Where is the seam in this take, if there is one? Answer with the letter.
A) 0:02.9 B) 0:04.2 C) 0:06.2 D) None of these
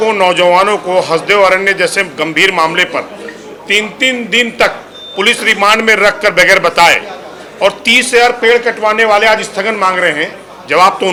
D